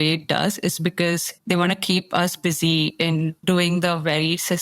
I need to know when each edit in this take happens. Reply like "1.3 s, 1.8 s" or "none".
3.0 s